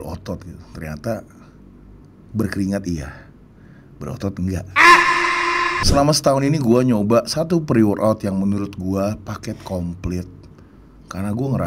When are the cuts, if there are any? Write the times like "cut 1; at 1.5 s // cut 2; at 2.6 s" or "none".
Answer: cut 1; at 5.8 s